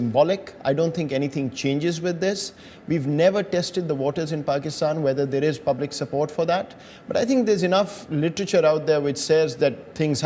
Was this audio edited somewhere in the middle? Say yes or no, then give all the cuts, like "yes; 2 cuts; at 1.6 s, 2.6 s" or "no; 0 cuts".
no; 0 cuts